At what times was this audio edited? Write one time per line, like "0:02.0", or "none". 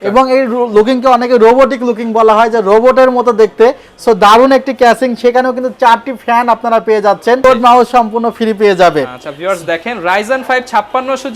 0:07.4